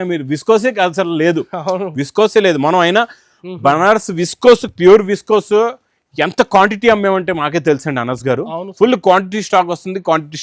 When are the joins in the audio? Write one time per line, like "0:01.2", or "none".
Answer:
none

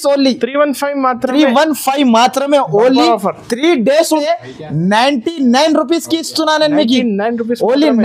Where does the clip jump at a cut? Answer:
0:04.2

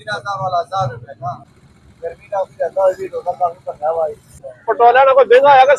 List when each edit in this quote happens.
0:01.4
0:04.2

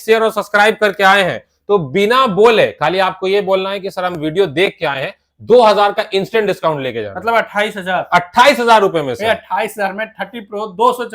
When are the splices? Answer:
none

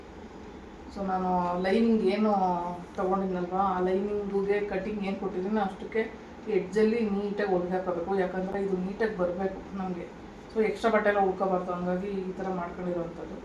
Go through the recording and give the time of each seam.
none

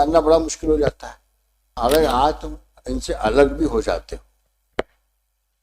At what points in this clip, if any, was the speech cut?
0:01.7

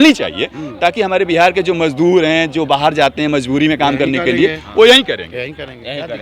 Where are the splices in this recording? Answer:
none

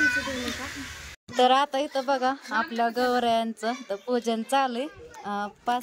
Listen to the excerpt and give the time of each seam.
0:01.2

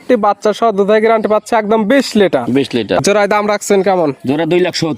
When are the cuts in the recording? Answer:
0:03.0

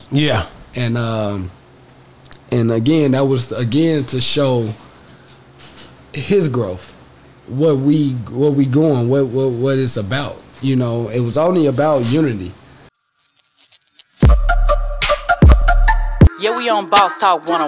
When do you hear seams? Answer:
0:12.9

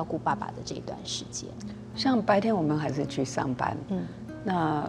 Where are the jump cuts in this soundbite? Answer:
none

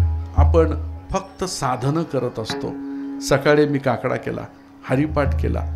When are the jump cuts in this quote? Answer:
none

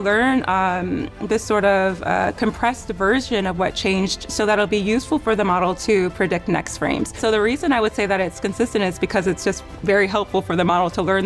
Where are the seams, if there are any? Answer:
0:07.2

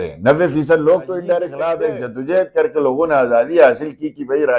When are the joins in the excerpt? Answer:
0:01.7

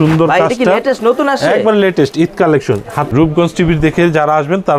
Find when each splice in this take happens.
0:03.1

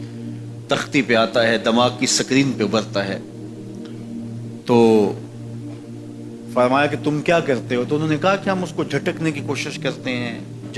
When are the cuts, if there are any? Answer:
0:05.2
0:06.6

